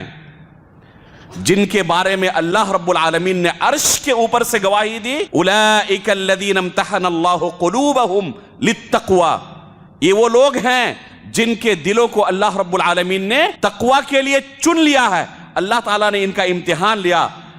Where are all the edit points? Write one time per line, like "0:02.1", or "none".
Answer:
0:05.2
0:13.5